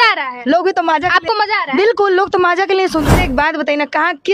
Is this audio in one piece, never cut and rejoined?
no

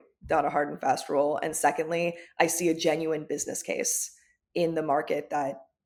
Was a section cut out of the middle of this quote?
no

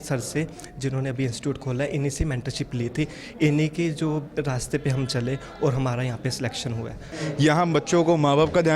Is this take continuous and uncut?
no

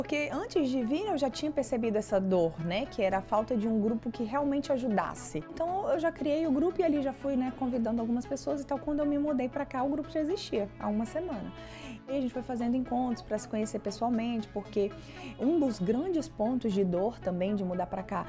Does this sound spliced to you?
yes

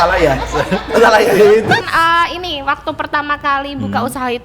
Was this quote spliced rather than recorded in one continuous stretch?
yes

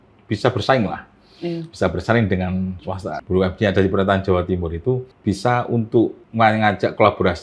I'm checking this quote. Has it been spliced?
yes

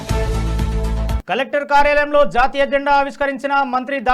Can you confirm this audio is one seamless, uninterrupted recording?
no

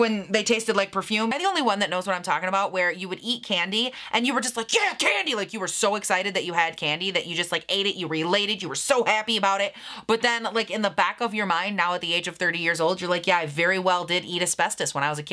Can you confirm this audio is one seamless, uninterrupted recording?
yes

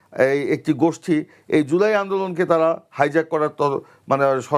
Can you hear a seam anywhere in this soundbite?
no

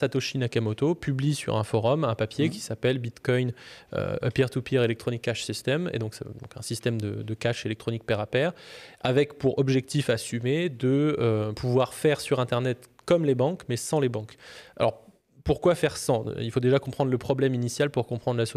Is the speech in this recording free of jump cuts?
yes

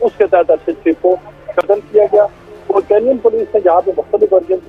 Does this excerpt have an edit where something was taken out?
no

